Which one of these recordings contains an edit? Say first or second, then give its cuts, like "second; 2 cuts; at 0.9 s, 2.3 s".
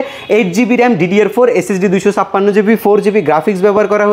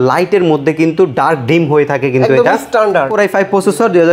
second; 1 cut; at 3.1 s